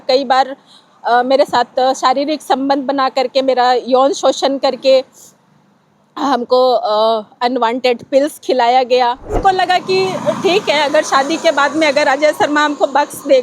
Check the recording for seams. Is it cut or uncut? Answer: cut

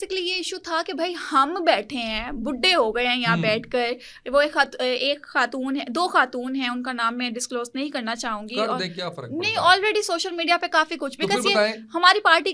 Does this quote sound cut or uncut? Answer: uncut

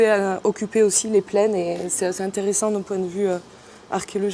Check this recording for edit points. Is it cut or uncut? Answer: uncut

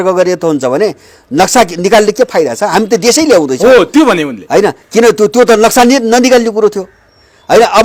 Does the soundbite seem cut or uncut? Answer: uncut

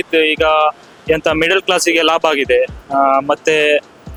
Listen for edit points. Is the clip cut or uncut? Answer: uncut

